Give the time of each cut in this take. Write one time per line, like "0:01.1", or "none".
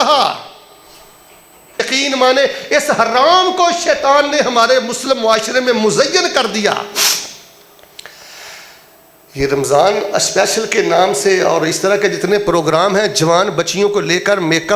0:01.8